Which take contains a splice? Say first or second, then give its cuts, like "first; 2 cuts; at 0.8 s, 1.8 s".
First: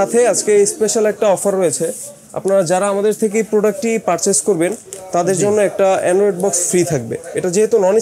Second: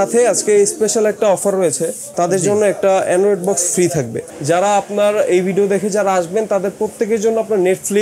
second; 2 cuts; at 2.0 s, 4.2 s